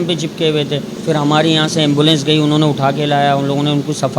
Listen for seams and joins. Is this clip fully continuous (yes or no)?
no